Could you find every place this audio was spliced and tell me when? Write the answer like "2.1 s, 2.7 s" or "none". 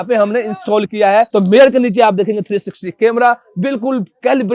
1.3 s